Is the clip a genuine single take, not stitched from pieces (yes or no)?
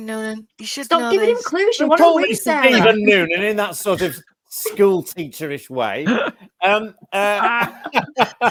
yes